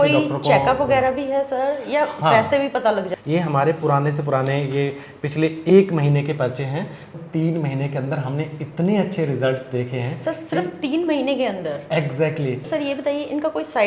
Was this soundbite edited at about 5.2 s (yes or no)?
no